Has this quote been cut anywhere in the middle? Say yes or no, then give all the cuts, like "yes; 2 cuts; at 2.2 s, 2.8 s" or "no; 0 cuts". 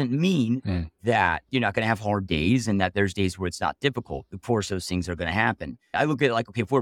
yes; 1 cut; at 5.8 s